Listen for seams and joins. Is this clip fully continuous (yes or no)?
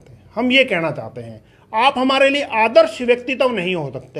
yes